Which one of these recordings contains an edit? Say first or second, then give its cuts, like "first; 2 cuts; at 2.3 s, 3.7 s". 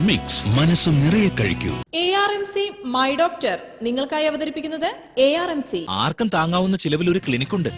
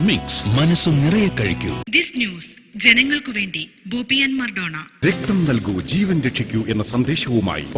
first; 1 cut; at 1.8 s